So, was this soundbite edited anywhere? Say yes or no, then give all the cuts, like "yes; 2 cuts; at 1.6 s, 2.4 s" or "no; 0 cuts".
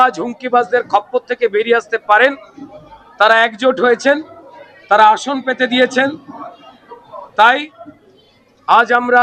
no; 0 cuts